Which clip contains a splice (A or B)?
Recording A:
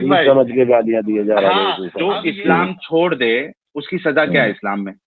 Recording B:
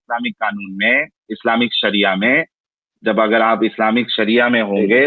A